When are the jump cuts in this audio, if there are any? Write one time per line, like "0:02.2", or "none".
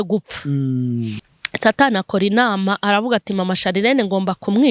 0:01.2